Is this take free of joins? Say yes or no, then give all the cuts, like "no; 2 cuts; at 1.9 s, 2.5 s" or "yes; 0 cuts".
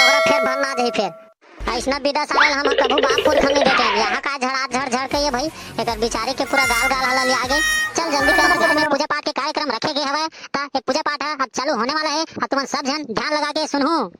no; 1 cut; at 8.4 s